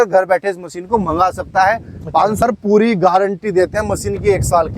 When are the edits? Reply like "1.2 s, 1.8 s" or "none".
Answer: 2.4 s